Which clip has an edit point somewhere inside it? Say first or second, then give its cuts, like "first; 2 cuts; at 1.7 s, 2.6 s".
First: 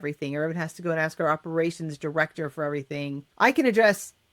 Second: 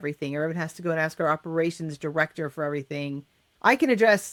first; 1 cut; at 3.2 s